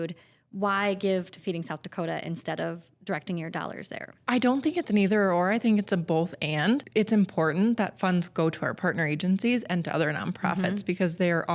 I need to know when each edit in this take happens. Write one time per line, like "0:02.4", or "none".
0:04.1
0:06.8